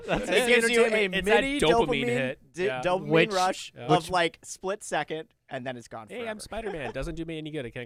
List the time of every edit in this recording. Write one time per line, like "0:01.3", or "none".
none